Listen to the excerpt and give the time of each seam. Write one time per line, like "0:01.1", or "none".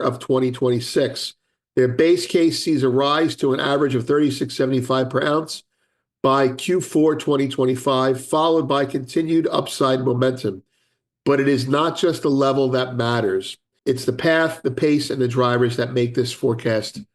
0:13.7